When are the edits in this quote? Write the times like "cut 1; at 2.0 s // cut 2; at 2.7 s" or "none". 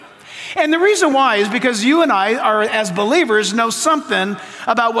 cut 1; at 1.1 s